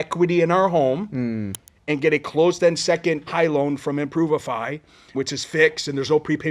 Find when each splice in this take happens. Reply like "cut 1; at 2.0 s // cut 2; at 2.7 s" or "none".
cut 1; at 3.3 s // cut 2; at 5.1 s